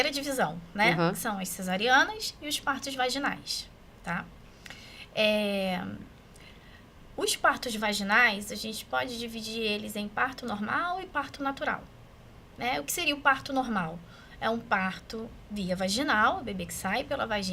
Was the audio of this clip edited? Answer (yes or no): no